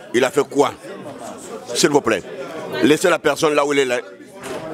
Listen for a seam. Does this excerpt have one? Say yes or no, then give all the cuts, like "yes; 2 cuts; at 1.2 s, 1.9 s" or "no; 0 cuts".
no; 0 cuts